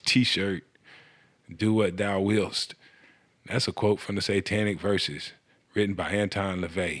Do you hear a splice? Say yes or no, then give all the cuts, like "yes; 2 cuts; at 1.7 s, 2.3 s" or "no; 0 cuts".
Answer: no; 0 cuts